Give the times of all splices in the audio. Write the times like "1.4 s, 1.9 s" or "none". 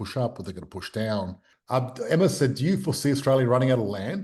1.5 s